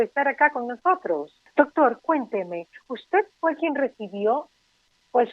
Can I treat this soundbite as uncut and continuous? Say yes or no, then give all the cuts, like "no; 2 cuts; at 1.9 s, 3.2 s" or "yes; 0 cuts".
no; 1 cut; at 1.4 s